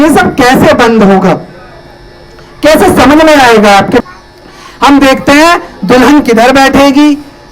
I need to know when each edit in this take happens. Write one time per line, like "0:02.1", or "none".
0:04.0